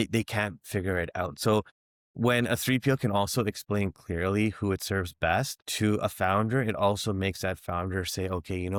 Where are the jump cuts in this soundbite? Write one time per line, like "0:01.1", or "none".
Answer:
none